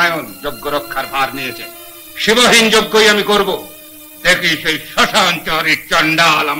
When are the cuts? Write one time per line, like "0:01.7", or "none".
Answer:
none